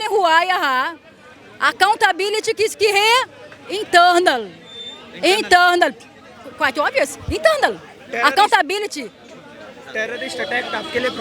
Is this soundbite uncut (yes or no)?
yes